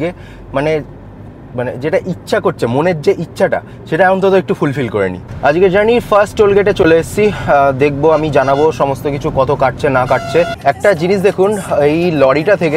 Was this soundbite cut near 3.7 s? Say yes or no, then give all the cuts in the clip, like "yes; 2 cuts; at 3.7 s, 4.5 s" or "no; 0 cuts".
no; 2 cuts; at 5.2 s, 10.5 s